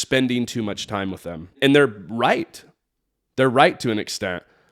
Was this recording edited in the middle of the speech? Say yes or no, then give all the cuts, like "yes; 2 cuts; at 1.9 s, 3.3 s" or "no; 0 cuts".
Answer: yes; 1 cut; at 1.6 s